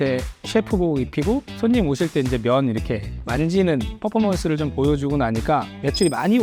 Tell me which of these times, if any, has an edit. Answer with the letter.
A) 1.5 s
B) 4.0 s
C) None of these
C